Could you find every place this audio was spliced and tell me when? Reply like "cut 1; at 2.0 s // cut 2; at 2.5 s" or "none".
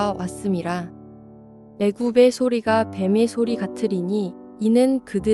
cut 1; at 1.2 s